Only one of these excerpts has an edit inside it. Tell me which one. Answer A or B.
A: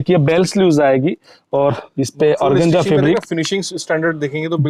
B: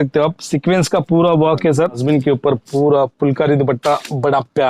B